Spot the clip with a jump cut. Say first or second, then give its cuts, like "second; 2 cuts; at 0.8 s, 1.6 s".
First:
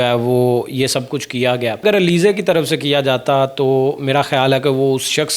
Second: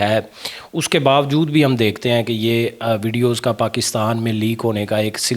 first; 1 cut; at 1.8 s